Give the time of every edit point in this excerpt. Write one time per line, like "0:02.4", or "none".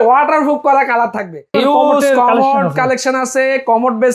0:01.5